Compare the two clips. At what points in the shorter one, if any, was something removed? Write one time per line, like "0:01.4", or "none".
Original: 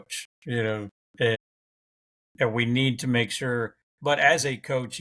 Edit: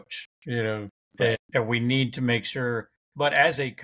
0:01.4

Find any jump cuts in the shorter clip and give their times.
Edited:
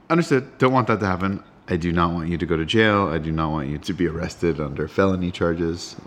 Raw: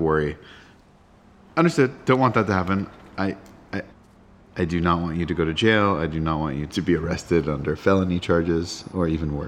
0:01.5

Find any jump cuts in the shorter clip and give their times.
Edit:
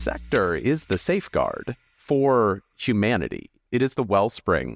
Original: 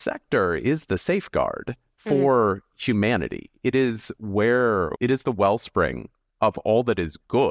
0:03.6

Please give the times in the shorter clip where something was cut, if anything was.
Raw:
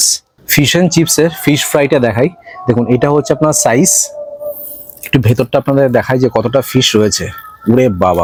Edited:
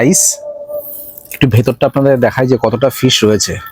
none

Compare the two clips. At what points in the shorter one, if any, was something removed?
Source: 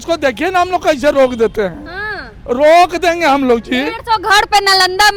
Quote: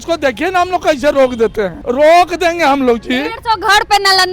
0:01.8

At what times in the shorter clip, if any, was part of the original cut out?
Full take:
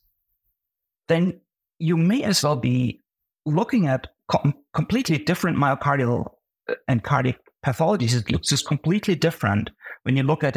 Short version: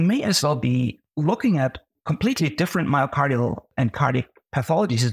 0:01.0
0:01.9
0:03.7

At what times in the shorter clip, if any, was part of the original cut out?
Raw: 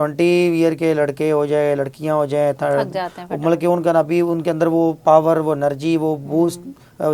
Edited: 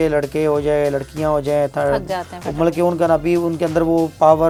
none

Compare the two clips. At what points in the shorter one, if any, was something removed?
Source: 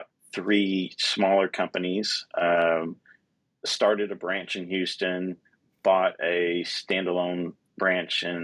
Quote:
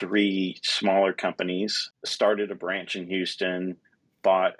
0:01.8

